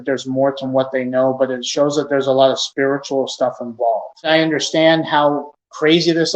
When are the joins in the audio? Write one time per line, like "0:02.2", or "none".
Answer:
0:04.1